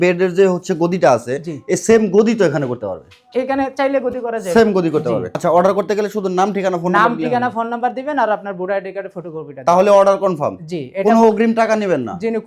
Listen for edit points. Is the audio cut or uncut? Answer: cut